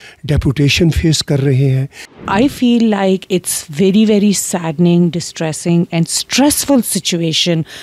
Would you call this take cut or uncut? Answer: cut